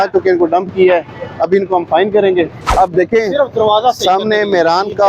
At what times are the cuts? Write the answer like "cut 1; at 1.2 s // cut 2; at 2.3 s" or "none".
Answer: cut 1; at 2.7 s